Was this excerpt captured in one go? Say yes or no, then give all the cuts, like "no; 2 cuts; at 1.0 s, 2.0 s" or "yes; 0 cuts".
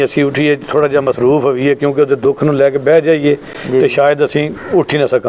yes; 0 cuts